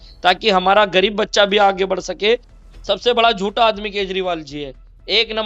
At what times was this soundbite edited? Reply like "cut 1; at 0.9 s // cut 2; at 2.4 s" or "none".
cut 1; at 2.5 s

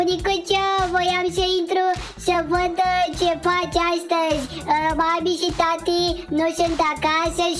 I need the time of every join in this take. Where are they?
none

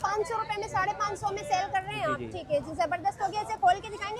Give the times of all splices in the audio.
none

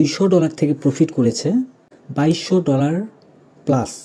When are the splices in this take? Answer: cut 1; at 2.3 s

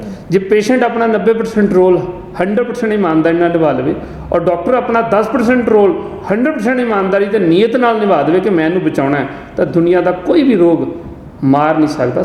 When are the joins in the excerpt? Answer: none

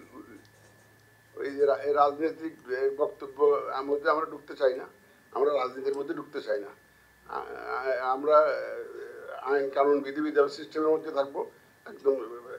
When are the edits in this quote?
none

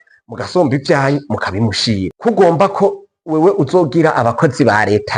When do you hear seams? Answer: cut 1; at 2.1 s

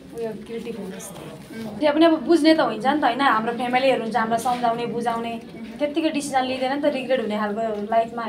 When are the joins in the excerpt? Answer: cut 1; at 1.8 s

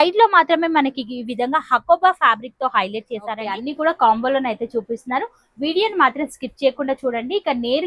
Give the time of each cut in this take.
cut 1; at 3.6 s

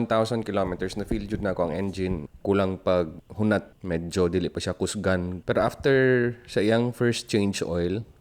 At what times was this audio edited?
cut 1; at 2.2 s // cut 2; at 3.7 s // cut 3; at 5.3 s

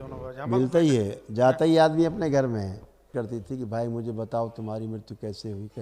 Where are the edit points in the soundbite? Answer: cut 1; at 3.1 s

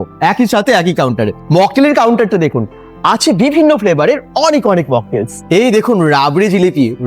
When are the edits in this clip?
cut 1; at 1.4 s // cut 2; at 5.4 s

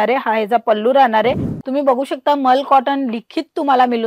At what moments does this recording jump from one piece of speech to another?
cut 1; at 1.5 s

